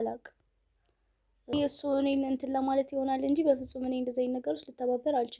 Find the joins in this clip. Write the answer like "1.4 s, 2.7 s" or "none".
1.5 s